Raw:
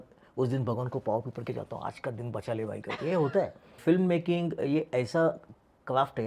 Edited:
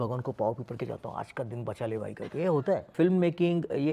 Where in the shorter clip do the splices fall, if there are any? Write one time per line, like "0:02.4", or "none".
0:02.9

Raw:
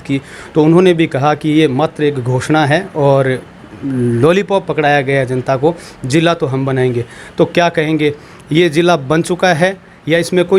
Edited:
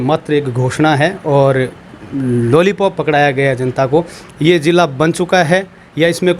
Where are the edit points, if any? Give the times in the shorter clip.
0:04.2

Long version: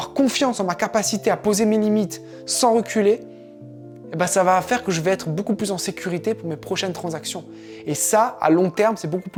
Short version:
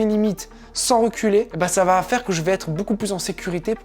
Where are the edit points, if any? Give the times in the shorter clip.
0:01.5

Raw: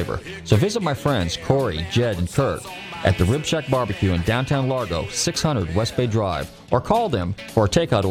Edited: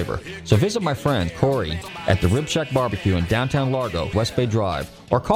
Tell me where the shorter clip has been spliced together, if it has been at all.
0:01.5
0:04.1

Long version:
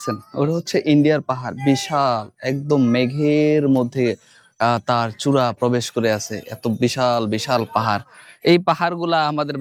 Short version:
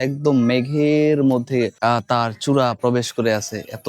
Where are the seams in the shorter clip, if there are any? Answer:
0:01.7

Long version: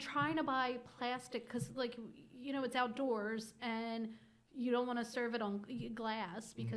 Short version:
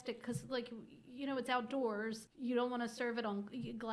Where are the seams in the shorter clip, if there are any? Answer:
0:02.2

